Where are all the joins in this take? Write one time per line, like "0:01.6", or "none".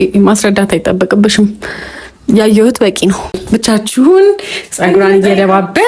0:03.4